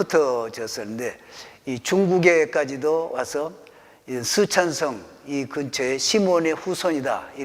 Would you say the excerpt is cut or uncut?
uncut